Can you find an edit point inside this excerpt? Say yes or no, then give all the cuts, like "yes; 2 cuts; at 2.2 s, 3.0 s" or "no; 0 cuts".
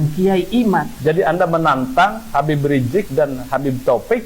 yes; 1 cut; at 0.9 s